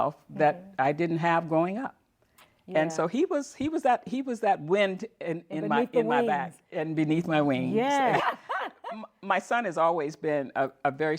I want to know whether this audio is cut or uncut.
cut